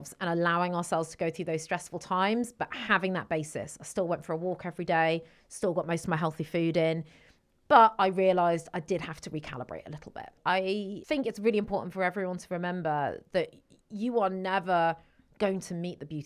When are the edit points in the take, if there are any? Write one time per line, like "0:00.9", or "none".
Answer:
0:10.4
0:11.0